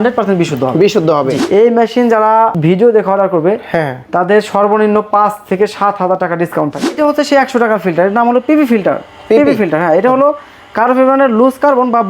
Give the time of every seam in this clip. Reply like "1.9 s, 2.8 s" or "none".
1.4 s, 6.9 s